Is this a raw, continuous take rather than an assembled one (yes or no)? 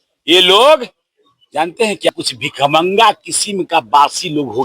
no